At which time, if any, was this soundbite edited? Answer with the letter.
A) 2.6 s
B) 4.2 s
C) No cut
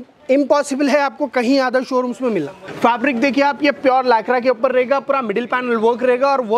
A